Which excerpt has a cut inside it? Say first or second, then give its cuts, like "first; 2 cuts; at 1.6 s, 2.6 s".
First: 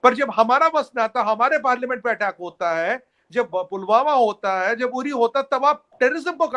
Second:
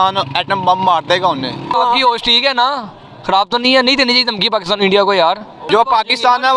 second; 2 cuts; at 1.7 s, 5.7 s